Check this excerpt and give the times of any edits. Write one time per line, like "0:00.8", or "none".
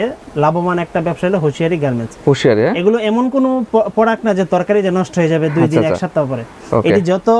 none